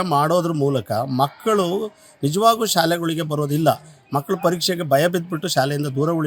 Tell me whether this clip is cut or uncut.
uncut